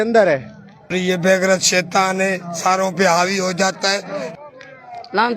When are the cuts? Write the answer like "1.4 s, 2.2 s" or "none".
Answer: 0.9 s, 4.3 s